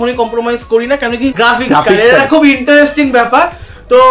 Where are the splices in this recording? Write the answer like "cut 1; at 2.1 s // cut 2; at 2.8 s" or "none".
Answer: cut 1; at 1.3 s